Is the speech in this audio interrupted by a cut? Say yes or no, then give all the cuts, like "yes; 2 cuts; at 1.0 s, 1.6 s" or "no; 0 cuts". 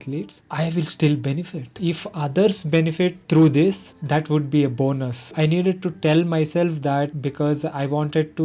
yes; 4 cuts; at 1.7 s, 3.2 s, 5.3 s, 7.1 s